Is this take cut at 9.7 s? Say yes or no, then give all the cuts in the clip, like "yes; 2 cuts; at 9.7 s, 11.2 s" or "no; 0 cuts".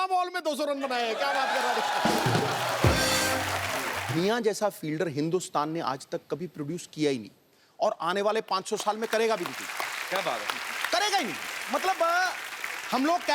no; 1 cut; at 4.0 s